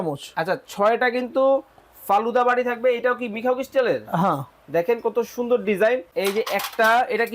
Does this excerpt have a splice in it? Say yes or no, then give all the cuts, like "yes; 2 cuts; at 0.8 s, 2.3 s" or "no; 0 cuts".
yes; 1 cut; at 6.1 s